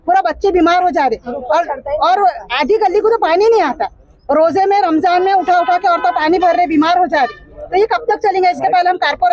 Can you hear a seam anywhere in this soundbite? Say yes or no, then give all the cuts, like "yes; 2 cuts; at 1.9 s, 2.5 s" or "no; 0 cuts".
no; 0 cuts